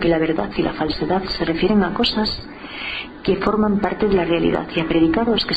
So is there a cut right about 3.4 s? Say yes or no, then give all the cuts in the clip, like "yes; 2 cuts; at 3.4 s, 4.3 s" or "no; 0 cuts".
no; 1 cut; at 1.7 s